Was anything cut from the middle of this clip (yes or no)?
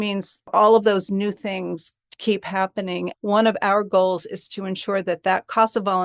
yes